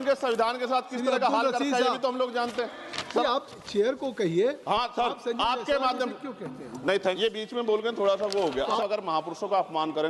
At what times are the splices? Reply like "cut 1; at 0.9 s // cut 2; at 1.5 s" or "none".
cut 1; at 3.2 s // cut 2; at 7.2 s // cut 3; at 8.8 s